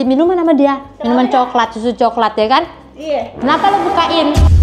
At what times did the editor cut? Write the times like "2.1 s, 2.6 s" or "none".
none